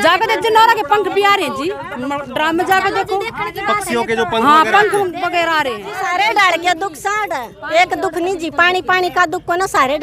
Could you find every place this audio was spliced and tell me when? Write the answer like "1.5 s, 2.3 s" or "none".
6.0 s

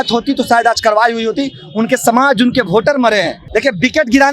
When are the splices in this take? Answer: 3.4 s

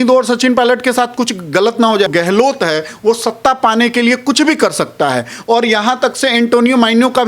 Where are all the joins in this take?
2.1 s

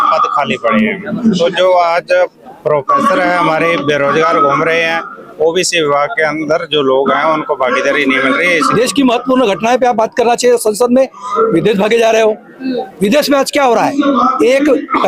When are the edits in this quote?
8.7 s

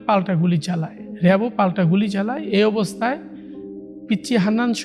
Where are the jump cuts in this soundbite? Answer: none

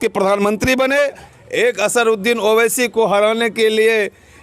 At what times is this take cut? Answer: 1.2 s

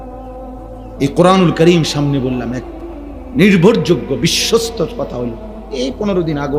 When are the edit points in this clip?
1.0 s

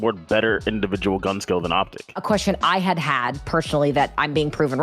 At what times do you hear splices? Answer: 2.2 s

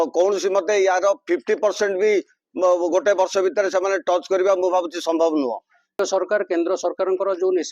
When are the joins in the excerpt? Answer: 6.0 s

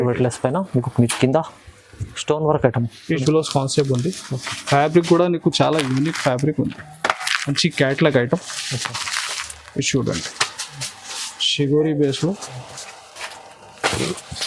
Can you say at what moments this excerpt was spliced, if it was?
3.2 s

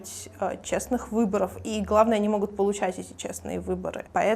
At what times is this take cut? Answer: none

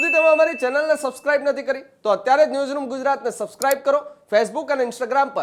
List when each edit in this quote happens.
none

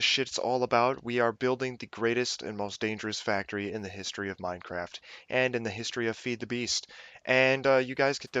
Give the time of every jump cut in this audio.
3.5 s

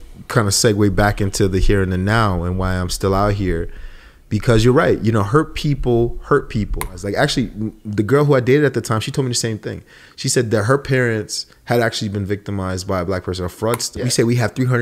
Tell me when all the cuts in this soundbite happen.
7.0 s, 13.9 s

